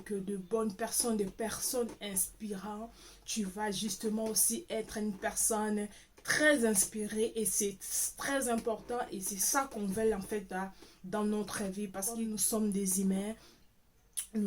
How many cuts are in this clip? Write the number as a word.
one